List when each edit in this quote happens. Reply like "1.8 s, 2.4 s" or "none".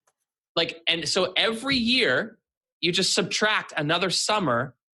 none